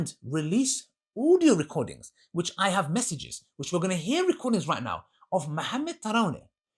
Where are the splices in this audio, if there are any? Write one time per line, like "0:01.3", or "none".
none